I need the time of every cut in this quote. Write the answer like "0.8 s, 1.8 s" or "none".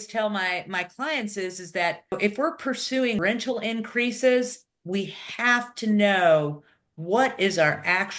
2.1 s, 3.2 s